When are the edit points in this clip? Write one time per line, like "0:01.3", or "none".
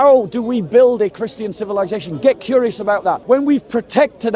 0:03.2